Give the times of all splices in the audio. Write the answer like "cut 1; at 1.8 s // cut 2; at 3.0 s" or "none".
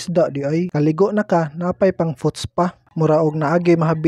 cut 1; at 2.9 s